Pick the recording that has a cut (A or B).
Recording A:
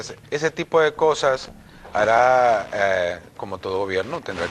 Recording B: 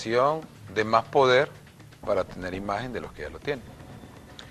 A